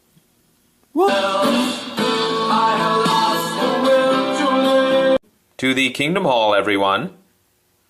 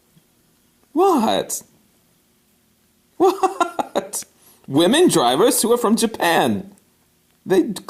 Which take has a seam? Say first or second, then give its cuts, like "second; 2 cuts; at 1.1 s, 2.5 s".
second; 1 cut; at 1.1 s